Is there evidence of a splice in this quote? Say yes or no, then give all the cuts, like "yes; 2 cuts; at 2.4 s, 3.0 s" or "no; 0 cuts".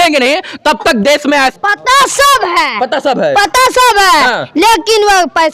yes; 1 cut; at 1.5 s